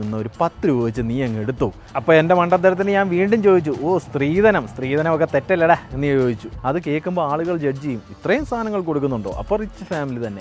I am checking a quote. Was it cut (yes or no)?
yes